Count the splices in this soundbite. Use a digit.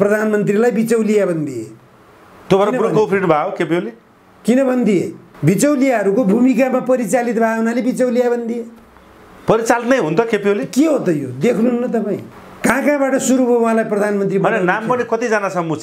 0